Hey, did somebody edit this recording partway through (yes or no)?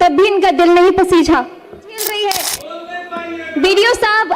yes